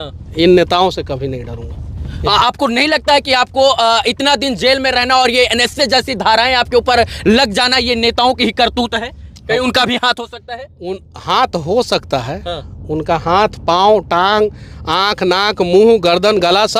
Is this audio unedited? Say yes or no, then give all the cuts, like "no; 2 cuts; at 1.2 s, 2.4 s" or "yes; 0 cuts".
yes; 0 cuts